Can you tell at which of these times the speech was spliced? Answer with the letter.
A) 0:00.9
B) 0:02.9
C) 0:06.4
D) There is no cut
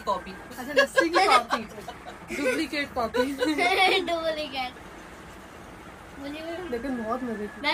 D